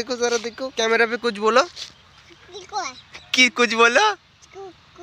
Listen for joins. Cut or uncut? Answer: uncut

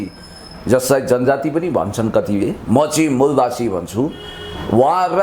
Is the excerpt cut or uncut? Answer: uncut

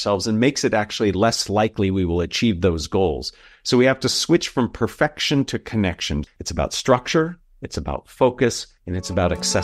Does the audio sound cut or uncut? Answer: cut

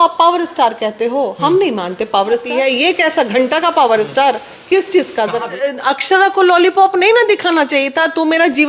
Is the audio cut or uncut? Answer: cut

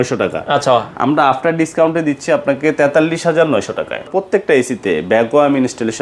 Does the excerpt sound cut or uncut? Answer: cut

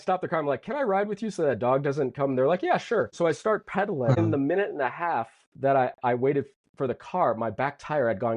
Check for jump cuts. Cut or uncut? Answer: cut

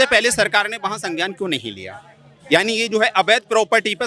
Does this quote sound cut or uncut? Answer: uncut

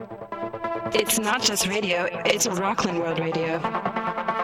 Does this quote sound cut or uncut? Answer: uncut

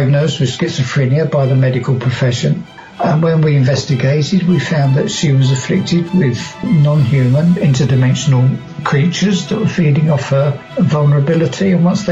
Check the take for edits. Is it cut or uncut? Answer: cut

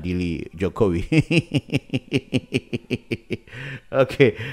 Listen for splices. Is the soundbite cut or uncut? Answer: uncut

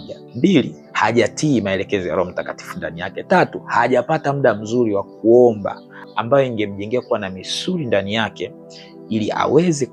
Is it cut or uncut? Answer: uncut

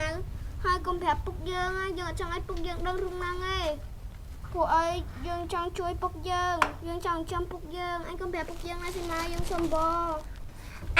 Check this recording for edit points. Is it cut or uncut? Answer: uncut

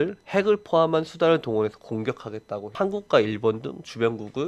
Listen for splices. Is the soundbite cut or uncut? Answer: cut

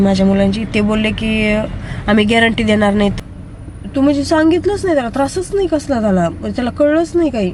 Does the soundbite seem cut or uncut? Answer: cut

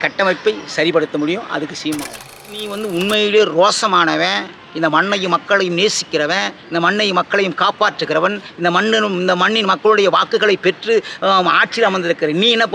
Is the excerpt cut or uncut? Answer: cut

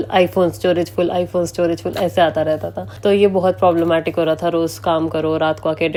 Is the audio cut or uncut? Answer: uncut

